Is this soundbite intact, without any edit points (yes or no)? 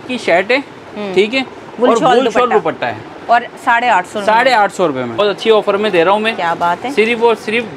no